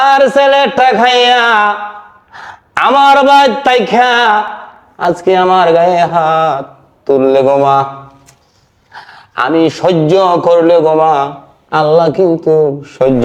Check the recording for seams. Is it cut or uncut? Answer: uncut